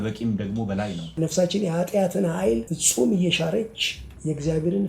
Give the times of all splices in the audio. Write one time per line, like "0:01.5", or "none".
0:01.1
0:02.8